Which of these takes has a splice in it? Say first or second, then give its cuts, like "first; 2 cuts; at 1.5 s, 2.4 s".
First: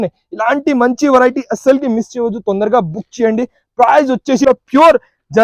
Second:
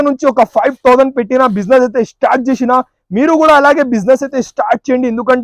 first; 1 cut; at 4.4 s